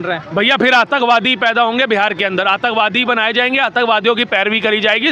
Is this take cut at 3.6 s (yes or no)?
no